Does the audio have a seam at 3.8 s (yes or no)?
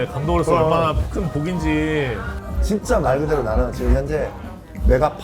no